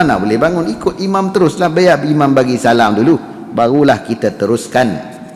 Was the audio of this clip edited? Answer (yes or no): yes